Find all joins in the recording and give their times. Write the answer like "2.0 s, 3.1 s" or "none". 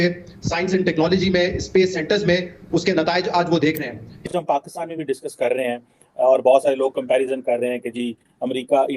4.1 s